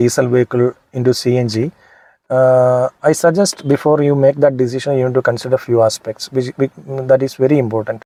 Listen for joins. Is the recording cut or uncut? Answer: uncut